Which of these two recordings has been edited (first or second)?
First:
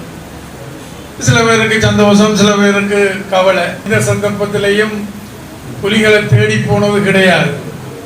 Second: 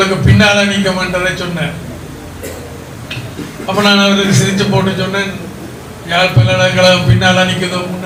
first